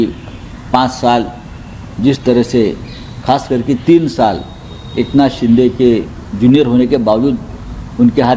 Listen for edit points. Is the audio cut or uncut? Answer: uncut